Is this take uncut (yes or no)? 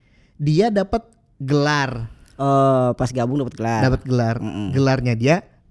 yes